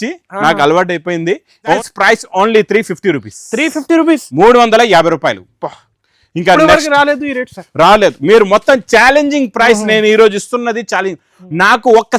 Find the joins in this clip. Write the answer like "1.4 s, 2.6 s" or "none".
1.8 s